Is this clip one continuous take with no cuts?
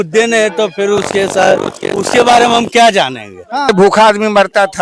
no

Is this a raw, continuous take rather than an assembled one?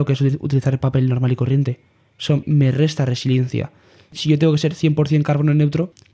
no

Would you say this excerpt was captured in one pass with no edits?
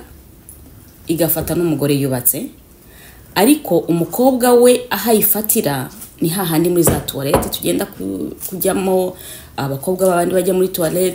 yes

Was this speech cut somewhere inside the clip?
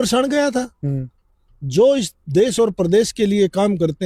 no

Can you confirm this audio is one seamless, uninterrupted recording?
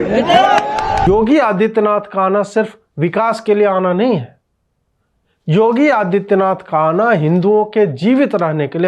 no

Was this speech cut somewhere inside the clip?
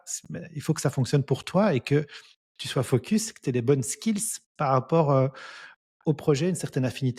no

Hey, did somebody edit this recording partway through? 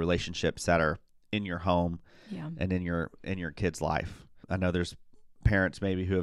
yes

